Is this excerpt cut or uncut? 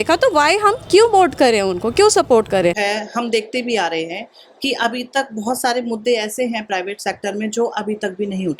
cut